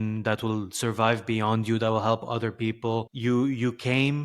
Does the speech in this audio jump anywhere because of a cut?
yes; 1 cut; at 3.1 s

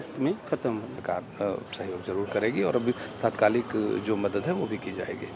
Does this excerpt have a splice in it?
yes; 1 cut; at 1.0 s

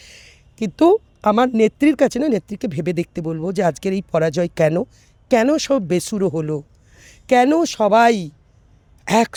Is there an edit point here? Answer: no; 0 cuts

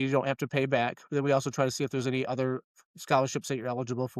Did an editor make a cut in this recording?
no; 0 cuts

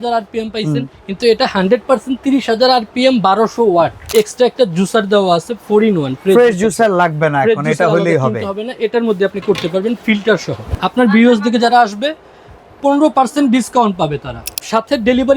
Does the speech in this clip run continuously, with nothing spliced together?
no; 3 cuts; at 4.0 s, 10.8 s, 14.4 s

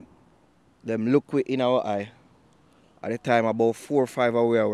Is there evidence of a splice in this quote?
no; 0 cuts

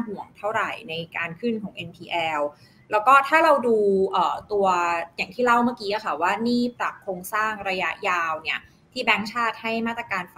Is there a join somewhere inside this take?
no; 0 cuts

